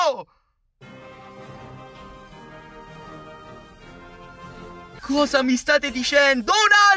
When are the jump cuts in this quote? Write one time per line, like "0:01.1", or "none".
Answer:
0:04.9